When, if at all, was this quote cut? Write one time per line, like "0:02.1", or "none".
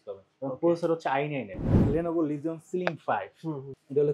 0:01.7